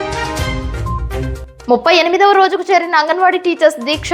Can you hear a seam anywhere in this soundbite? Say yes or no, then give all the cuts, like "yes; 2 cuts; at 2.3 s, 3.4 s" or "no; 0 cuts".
yes; 1 cut; at 1.4 s